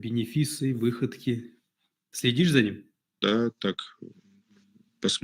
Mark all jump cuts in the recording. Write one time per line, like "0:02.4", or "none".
0:03.2